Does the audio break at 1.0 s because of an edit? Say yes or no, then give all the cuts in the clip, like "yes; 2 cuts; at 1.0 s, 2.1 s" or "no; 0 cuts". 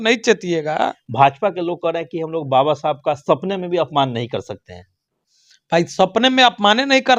yes; 1 cut; at 1.0 s